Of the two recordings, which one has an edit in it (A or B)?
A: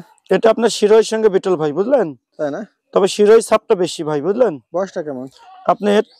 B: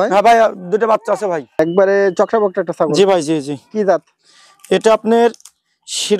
B